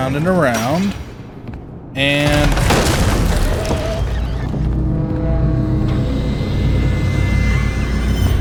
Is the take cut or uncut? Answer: uncut